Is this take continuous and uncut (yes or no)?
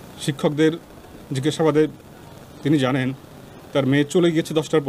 yes